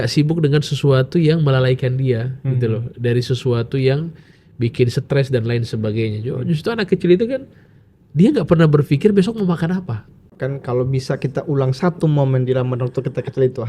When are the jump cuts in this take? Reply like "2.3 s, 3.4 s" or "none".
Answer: 10.3 s